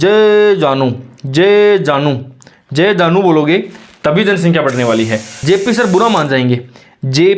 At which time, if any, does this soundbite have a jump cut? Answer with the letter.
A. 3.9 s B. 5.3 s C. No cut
B